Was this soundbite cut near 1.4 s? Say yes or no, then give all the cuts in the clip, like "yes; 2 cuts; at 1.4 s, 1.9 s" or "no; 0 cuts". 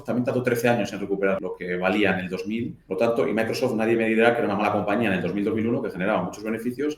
yes; 2 cuts; at 1.4 s, 2.8 s